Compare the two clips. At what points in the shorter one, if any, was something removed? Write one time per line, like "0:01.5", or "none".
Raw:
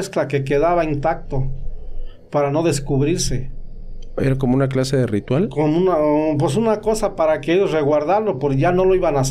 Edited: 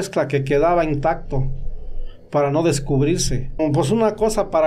0:03.6